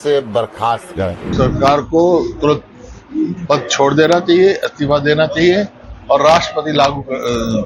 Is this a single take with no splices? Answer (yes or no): no